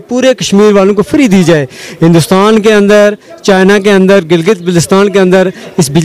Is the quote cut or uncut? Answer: uncut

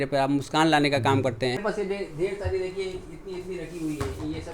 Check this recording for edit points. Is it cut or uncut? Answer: cut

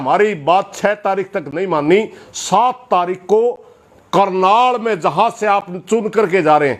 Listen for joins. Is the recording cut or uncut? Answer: uncut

